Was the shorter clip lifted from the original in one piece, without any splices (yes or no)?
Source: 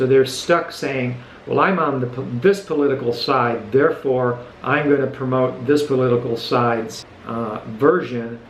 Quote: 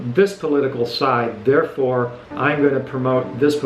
yes